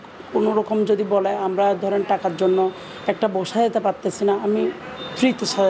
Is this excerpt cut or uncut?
uncut